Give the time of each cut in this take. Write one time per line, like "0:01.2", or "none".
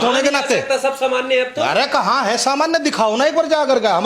none